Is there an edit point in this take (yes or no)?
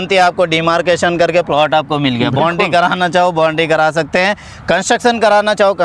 no